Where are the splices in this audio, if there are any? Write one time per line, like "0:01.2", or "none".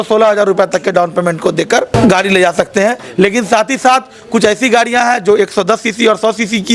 none